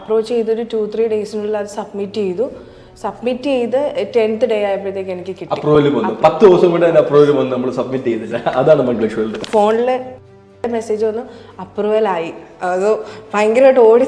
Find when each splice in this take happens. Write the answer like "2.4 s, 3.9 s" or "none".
9.4 s